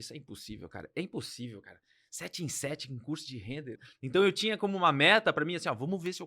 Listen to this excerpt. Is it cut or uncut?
cut